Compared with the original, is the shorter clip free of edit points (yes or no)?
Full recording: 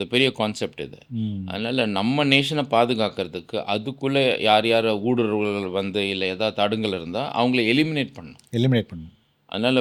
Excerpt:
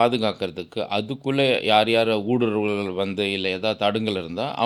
yes